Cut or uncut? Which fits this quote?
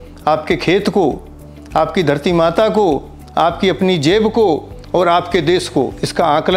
uncut